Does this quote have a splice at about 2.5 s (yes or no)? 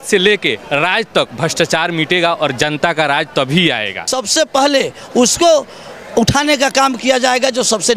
no